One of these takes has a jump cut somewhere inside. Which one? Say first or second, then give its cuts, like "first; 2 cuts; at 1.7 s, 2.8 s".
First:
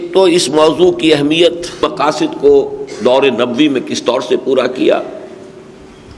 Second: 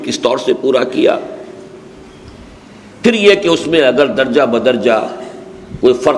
first; 1 cut; at 1.9 s